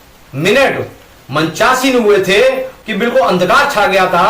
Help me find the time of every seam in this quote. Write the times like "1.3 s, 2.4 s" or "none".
2.7 s

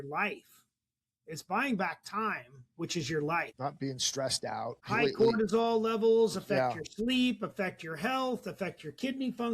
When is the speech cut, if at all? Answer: 3.5 s, 4.8 s

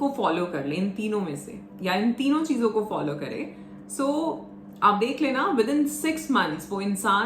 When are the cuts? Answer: none

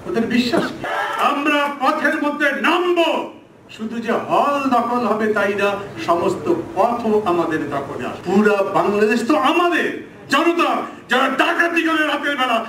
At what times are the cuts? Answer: 0.9 s, 8.1 s

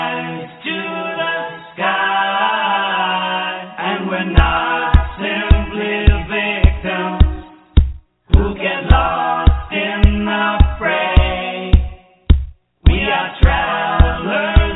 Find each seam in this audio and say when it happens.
none

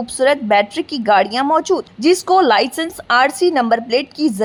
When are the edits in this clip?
none

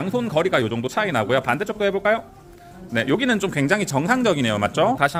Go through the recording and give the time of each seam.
none

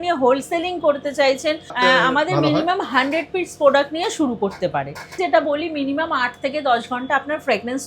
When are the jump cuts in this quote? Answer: 1.7 s, 5.2 s

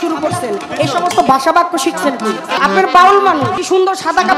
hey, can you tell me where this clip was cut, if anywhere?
2.5 s, 3.6 s

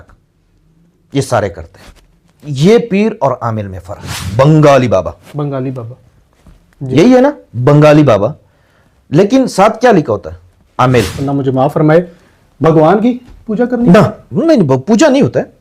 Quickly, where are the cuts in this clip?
4.2 s, 11.1 s

